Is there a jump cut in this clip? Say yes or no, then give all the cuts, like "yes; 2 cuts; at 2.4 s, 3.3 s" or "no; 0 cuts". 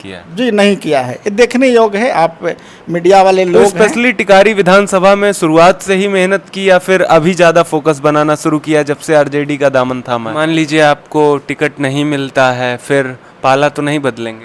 yes; 2 cuts; at 3.7 s, 10.3 s